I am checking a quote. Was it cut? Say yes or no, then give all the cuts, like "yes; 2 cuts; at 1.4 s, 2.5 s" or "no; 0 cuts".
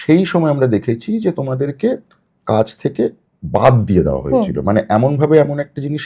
no; 0 cuts